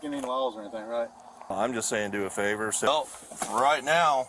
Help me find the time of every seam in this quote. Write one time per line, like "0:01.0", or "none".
0:01.5
0:02.9